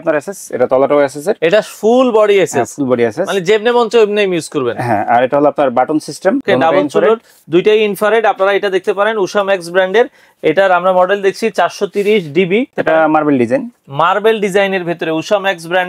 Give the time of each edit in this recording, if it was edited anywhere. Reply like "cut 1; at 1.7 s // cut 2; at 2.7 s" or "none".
cut 1; at 6.4 s // cut 2; at 12.7 s